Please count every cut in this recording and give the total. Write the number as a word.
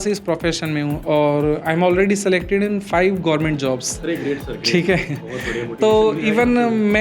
zero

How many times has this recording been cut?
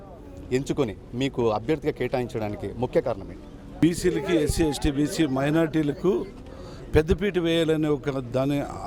one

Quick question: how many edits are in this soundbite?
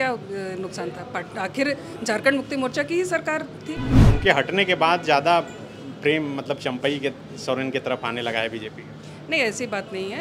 one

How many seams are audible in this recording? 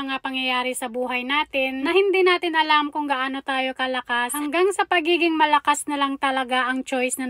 two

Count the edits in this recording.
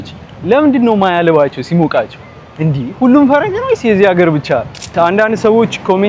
one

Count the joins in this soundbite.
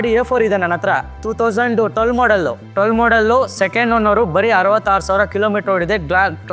two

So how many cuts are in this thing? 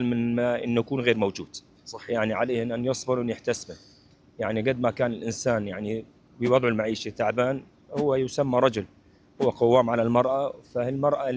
zero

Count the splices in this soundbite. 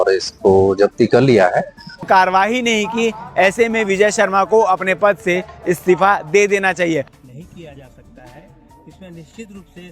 two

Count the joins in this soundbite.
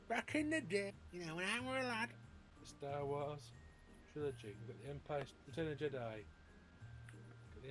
two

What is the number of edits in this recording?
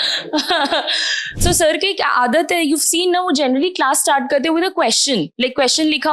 one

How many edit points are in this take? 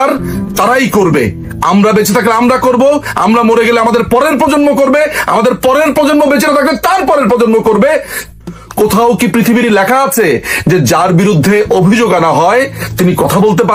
one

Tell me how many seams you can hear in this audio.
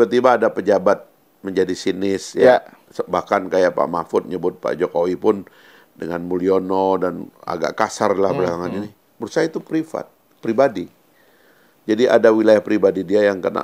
zero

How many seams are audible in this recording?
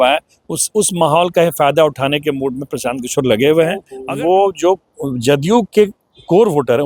one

